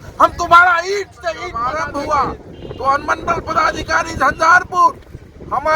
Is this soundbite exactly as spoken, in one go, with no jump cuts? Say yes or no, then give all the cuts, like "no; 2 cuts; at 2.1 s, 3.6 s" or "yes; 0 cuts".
no; 1 cut; at 1.6 s